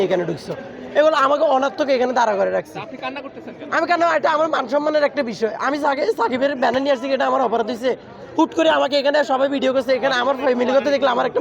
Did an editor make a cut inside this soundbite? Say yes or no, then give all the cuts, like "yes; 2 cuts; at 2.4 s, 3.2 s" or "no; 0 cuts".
no; 0 cuts